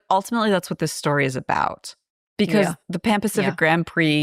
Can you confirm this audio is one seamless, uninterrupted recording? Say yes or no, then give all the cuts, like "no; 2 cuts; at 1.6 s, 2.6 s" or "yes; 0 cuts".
yes; 0 cuts